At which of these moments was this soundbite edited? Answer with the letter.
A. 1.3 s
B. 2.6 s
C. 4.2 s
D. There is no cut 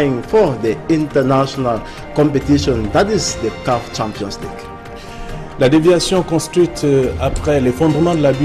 B